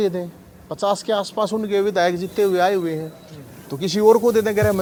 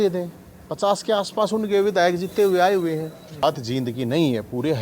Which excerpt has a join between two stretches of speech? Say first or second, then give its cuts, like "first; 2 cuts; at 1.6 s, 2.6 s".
second; 1 cut; at 3.4 s